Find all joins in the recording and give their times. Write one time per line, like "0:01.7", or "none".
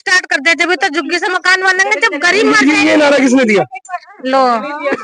none